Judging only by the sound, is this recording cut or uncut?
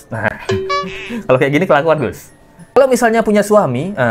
uncut